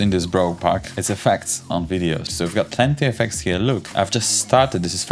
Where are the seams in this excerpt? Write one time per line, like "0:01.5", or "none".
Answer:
0:02.3

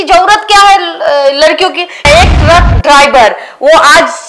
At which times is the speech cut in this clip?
0:02.1

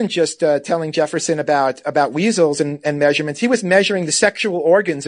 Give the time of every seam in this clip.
none

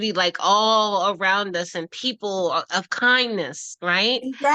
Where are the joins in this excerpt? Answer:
none

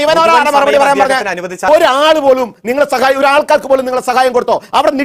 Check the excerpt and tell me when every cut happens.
0:01.5

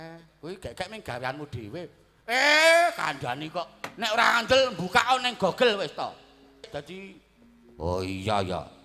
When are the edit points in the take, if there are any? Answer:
0:06.7

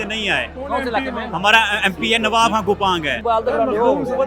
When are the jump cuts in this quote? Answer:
0:03.2

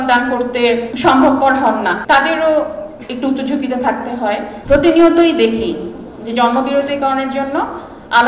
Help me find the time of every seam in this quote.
0:00.9
0:02.0
0:04.5

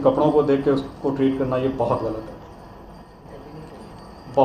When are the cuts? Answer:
0:03.2

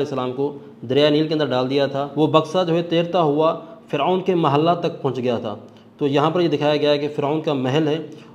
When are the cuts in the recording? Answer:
0:02.1

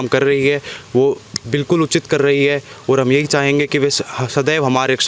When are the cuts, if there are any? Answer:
none

